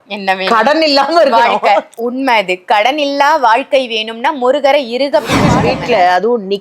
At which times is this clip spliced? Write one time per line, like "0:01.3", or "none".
0:05.6